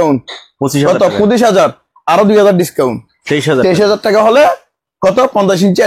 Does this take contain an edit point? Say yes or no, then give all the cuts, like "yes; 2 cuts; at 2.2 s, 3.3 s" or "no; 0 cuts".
no; 0 cuts